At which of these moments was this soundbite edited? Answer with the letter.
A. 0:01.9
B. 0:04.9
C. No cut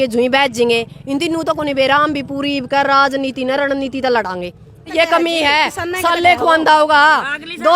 B